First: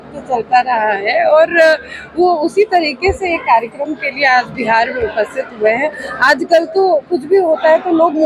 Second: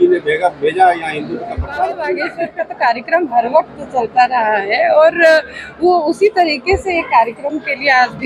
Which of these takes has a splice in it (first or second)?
second